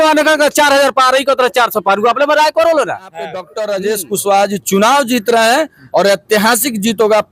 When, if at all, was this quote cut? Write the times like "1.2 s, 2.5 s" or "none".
3.5 s